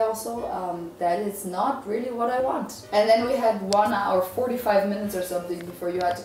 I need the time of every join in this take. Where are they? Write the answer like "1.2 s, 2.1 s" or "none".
2.5 s

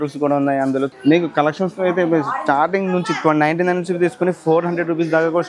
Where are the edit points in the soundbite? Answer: 0.9 s

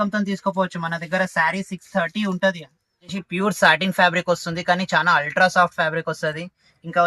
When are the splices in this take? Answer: 3.2 s

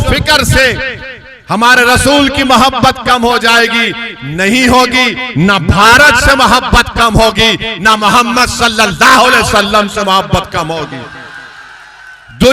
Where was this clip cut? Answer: none

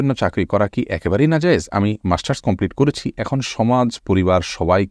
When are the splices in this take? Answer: none

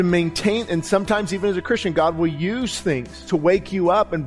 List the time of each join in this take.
3.1 s

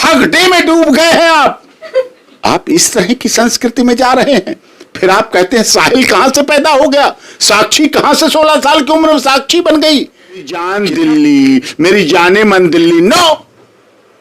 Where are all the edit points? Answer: 10.6 s

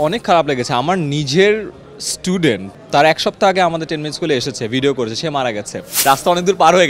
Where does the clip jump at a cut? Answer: 2.7 s, 5.8 s

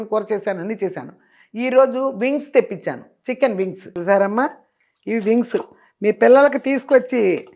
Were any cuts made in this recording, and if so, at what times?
3.9 s

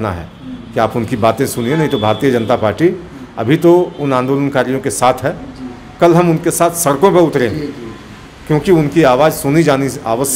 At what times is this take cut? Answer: none

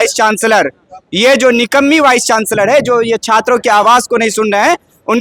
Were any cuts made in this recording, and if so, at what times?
none

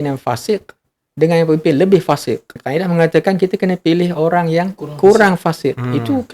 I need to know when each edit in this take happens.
2.6 s

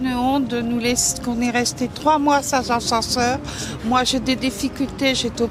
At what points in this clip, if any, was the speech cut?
none

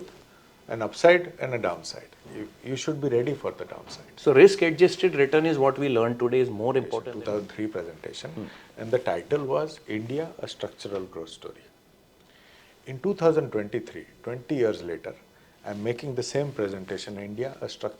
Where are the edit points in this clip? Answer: 7.0 s

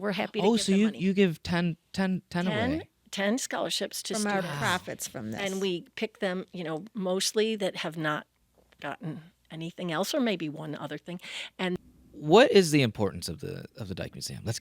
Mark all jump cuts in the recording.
11.8 s

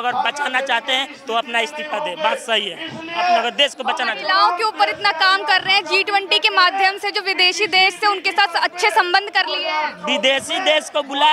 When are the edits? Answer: none

